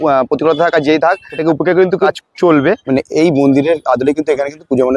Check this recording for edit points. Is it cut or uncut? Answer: cut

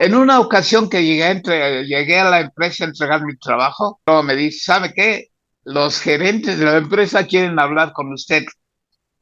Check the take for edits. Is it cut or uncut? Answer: cut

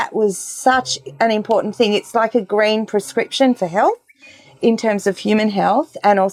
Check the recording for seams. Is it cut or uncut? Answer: uncut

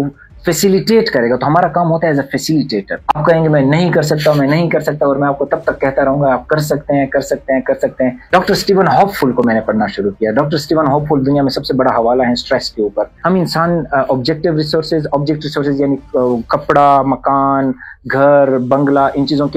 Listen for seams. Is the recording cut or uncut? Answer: cut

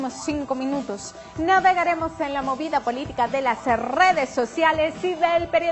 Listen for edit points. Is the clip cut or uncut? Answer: uncut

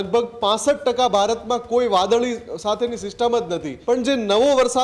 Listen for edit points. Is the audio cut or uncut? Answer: cut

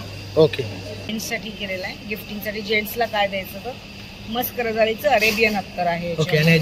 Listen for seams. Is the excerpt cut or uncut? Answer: cut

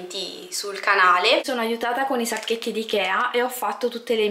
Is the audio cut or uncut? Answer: cut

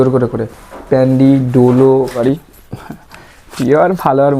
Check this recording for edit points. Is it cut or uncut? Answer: cut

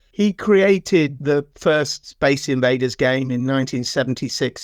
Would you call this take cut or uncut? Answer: uncut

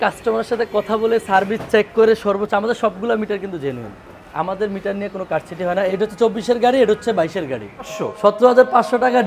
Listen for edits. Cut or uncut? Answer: cut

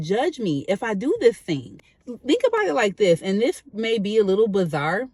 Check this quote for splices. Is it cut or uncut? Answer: uncut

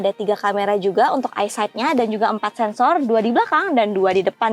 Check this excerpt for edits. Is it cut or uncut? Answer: uncut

